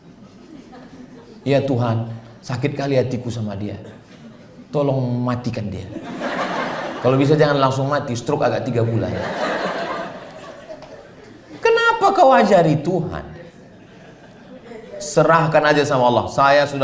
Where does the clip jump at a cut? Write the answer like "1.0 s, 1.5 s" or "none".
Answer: none